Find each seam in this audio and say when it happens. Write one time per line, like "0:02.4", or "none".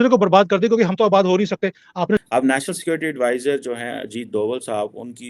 0:02.2